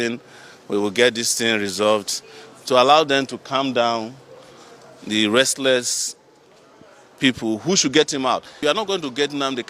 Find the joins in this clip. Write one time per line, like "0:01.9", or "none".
0:08.6